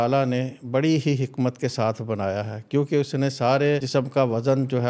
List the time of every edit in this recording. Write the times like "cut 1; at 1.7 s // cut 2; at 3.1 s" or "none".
cut 1; at 3.8 s